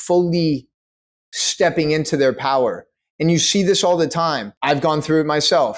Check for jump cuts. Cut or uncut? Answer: cut